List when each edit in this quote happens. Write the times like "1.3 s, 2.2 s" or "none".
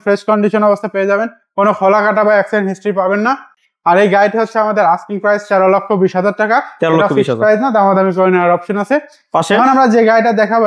none